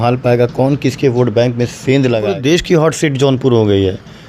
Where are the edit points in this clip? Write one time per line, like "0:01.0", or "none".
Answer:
0:02.3